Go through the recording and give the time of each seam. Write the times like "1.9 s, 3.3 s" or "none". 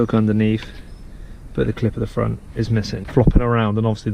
3.0 s